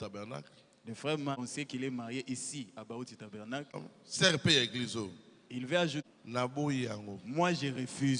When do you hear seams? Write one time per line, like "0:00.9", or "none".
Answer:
0:01.4
0:03.8
0:06.0

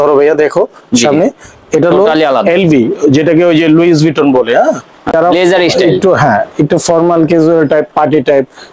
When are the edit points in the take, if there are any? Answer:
0:05.1

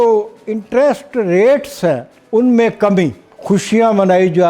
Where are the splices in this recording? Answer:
0:02.1
0:03.3

